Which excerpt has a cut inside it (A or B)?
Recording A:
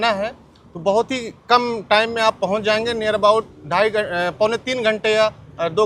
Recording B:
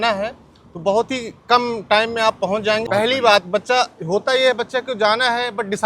B